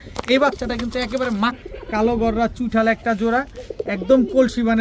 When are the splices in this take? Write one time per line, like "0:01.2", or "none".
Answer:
0:01.6